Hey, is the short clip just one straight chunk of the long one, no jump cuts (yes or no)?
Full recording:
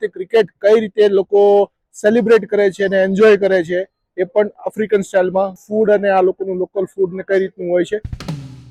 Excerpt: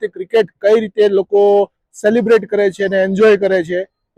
yes